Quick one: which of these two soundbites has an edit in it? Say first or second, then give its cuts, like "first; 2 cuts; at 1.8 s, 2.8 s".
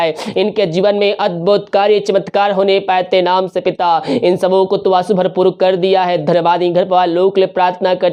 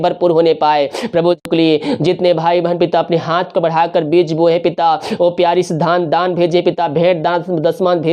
second; 1 cut; at 1.4 s